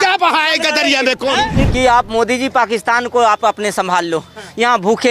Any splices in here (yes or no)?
yes